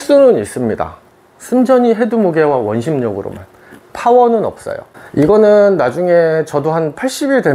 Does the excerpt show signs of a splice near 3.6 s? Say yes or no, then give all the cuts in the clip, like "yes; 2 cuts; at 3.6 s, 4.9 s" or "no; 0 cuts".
no; 1 cut; at 4.9 s